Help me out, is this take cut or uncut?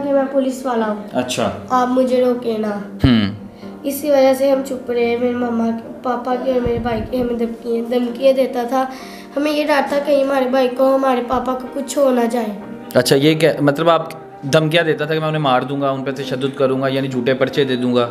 uncut